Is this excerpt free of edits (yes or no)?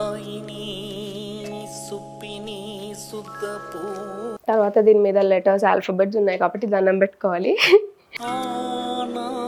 yes